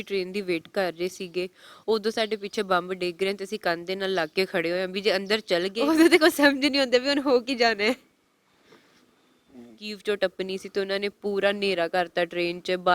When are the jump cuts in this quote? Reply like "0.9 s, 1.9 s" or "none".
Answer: 5.8 s, 9.9 s